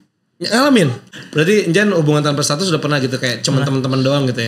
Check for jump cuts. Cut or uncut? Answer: cut